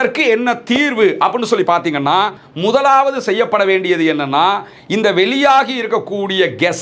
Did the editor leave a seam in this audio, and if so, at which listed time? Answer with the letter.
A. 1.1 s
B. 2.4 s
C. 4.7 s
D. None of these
B